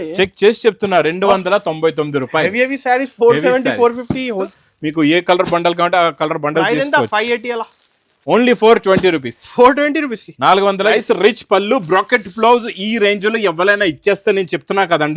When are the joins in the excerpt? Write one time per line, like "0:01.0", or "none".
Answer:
0:04.5
0:10.9